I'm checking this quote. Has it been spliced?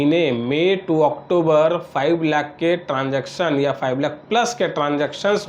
no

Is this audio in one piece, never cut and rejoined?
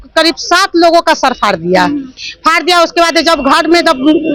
yes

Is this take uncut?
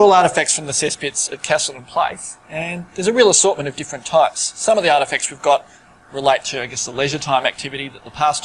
no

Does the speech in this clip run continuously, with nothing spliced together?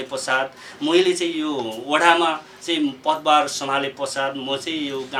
yes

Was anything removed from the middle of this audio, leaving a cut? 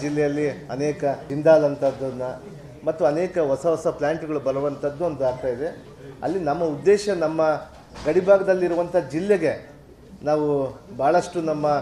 yes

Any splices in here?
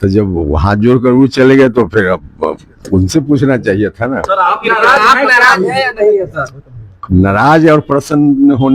no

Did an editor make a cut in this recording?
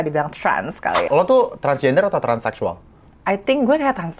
yes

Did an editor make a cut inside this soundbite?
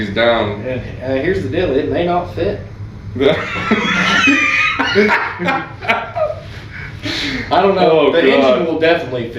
no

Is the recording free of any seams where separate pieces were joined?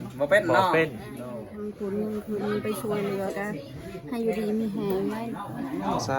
no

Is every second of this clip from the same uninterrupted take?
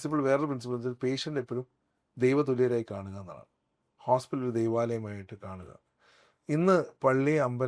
yes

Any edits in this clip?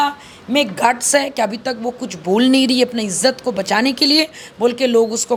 no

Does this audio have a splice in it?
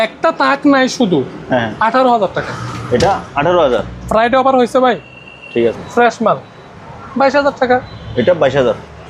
yes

